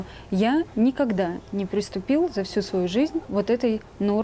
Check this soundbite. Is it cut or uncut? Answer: cut